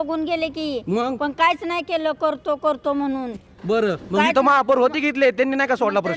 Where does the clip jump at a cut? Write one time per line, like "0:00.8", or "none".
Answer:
none